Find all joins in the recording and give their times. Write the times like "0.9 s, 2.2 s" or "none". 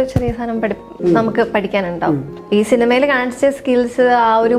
2.3 s

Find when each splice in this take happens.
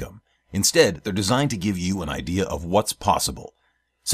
none

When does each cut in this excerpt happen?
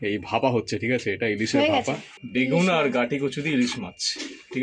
2.1 s

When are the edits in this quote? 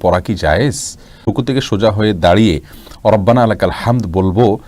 1.3 s

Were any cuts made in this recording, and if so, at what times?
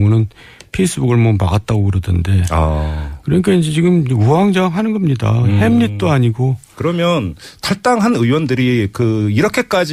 none

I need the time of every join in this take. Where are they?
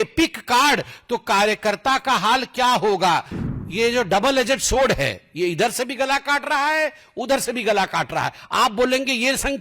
3.4 s

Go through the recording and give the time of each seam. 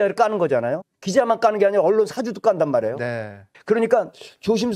0.9 s

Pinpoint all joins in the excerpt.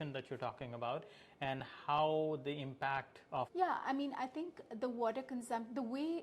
3.5 s

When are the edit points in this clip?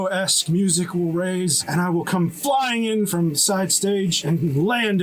1.6 s, 3.1 s, 4.2 s

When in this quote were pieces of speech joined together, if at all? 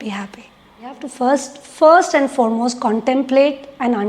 1.1 s

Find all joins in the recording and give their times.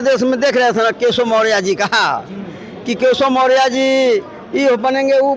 none

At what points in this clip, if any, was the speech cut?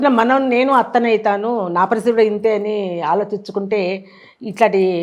none

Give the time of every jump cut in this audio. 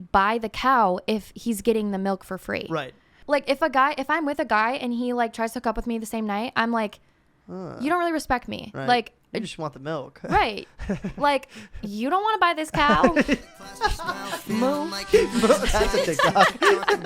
3.1 s

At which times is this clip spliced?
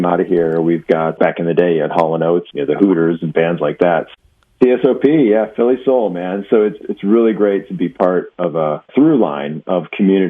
1.2 s, 2.5 s, 4.1 s, 6.8 s, 8.9 s

